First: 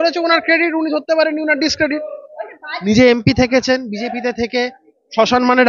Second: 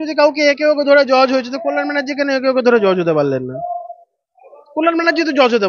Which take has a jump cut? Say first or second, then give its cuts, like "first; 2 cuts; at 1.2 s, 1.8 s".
first; 1 cut; at 2.8 s